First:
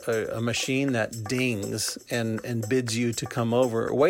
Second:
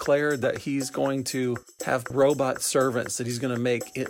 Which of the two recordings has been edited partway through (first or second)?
second